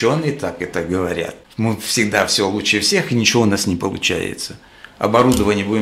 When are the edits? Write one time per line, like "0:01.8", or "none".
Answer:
0:01.4